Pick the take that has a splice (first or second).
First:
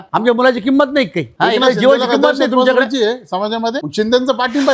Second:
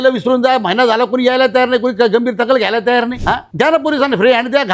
first